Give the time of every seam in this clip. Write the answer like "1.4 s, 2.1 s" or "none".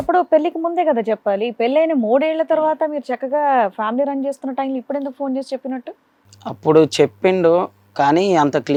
none